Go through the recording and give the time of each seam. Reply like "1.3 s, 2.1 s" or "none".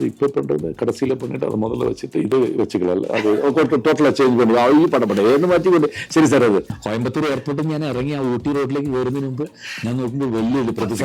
6.8 s